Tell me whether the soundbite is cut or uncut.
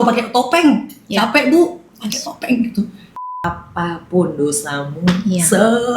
cut